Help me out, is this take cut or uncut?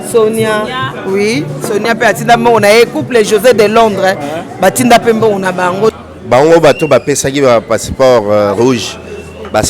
cut